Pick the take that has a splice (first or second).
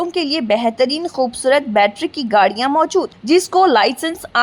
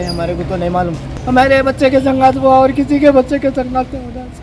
second